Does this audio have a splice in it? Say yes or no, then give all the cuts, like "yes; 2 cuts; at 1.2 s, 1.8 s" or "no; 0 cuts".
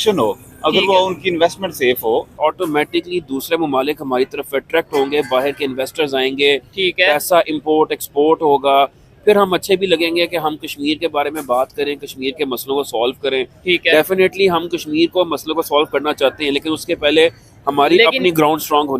yes; 1 cut; at 2.4 s